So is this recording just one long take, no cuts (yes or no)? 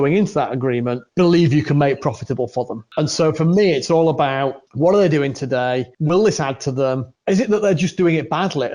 no